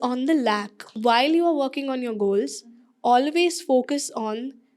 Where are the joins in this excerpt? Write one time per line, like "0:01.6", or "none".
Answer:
0:00.9